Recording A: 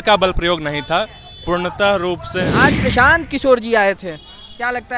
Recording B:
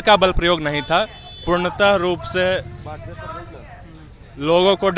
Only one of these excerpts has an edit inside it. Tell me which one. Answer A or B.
A